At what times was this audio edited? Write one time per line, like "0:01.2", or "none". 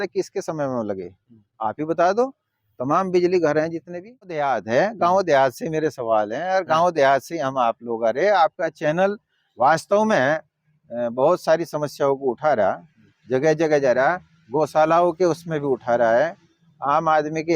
0:04.4